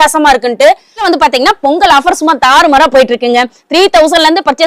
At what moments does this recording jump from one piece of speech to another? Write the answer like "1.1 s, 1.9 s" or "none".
1.0 s